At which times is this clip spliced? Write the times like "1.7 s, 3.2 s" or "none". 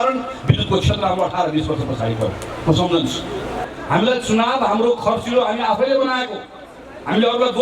3.6 s